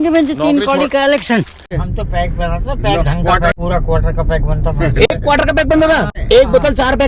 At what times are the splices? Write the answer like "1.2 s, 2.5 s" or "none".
1.7 s, 3.6 s, 6.2 s